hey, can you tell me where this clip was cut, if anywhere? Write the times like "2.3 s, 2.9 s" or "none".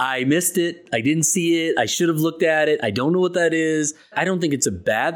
4.1 s